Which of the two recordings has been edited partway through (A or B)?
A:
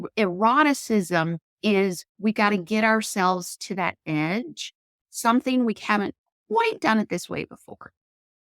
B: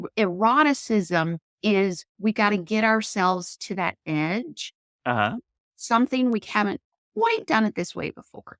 A